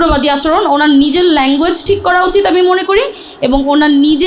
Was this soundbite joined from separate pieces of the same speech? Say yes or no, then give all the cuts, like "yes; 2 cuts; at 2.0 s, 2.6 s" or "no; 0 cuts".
no; 0 cuts